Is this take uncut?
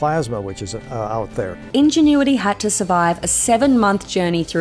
no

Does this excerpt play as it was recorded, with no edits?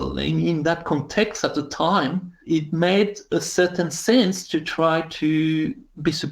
no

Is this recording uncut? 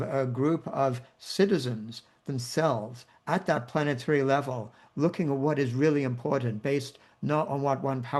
yes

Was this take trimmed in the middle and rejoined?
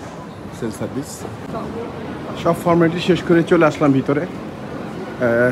no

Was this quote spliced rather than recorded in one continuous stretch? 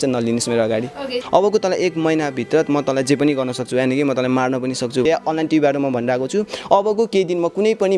yes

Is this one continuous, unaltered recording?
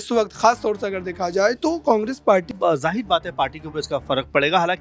no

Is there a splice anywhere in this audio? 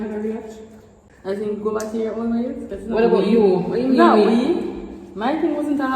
yes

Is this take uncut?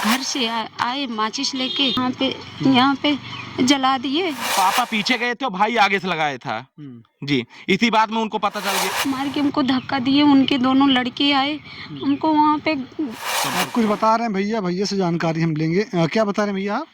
no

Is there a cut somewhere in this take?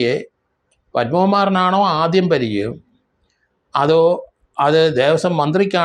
no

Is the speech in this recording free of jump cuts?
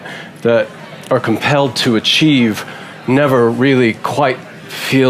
yes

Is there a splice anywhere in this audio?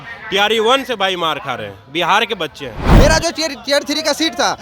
yes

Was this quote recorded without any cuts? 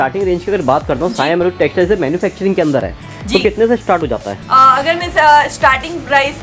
yes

